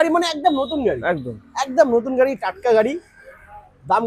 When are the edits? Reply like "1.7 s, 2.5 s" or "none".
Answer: none